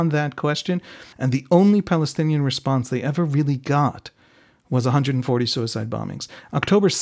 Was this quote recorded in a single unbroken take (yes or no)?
no